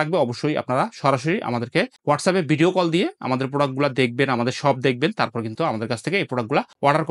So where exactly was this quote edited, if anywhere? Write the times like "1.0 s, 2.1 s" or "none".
none